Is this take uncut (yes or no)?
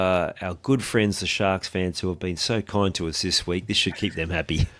yes